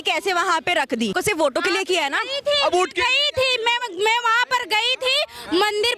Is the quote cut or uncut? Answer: cut